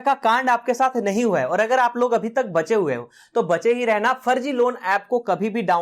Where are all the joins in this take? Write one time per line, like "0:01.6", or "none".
none